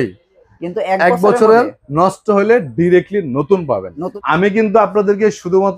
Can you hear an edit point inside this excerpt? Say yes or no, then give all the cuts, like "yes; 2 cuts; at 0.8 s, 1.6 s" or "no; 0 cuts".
yes; 1 cut; at 4.0 s